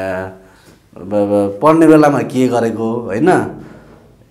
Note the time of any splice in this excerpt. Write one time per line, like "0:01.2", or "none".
none